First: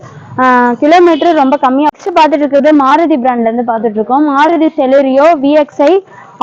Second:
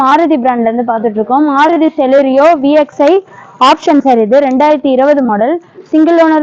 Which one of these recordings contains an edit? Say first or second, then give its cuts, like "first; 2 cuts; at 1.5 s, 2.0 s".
first; 1 cut; at 1.9 s